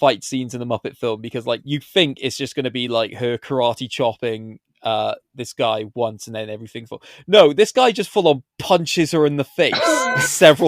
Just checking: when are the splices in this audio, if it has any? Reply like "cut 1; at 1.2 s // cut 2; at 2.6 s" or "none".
cut 1; at 1.6 s